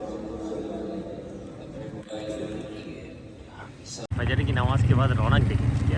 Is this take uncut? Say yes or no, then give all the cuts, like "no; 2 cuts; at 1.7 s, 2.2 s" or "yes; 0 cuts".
no; 1 cut; at 4.1 s